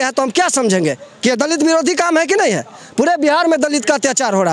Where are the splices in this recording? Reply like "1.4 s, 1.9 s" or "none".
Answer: none